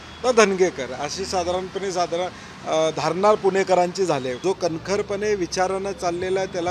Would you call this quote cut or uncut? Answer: cut